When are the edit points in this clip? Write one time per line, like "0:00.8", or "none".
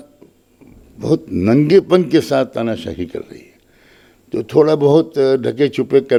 none